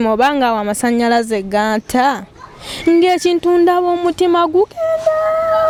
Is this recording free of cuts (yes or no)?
yes